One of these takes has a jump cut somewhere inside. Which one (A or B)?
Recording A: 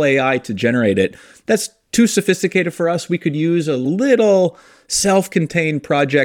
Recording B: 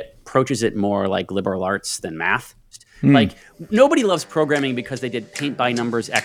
B